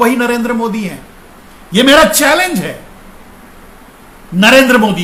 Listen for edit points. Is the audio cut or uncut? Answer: uncut